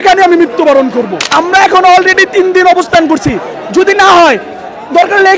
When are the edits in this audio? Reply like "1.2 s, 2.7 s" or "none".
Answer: 1.2 s